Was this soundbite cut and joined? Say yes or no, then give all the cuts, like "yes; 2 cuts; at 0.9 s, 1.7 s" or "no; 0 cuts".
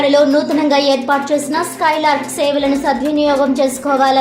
no; 0 cuts